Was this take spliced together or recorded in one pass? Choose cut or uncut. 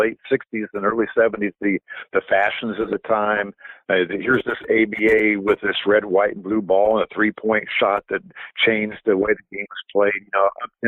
uncut